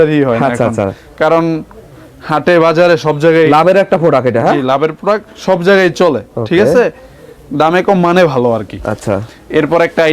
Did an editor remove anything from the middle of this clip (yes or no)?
no